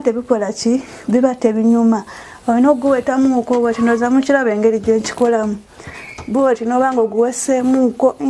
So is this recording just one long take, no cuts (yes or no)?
yes